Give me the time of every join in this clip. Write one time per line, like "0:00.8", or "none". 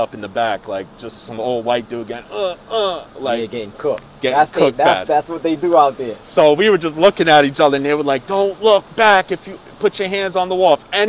none